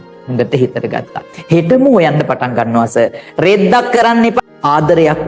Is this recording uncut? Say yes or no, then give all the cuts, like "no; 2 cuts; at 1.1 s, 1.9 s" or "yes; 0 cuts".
no; 1 cut; at 4.4 s